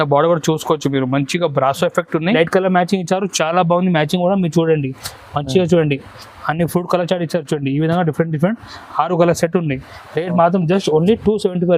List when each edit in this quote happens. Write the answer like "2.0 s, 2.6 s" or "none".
2.4 s